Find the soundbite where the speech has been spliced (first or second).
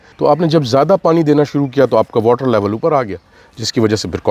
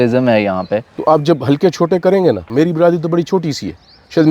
second